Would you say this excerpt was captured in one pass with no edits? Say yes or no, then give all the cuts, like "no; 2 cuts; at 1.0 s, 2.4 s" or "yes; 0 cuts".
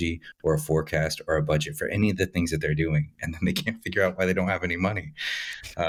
yes; 0 cuts